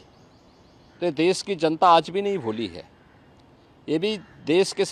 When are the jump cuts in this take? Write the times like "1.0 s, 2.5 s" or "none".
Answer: none